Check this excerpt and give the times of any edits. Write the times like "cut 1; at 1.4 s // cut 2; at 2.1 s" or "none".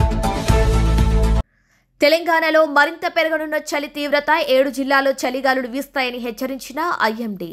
cut 1; at 1.4 s